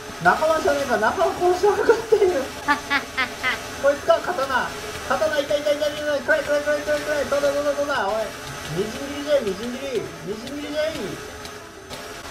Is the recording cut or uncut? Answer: uncut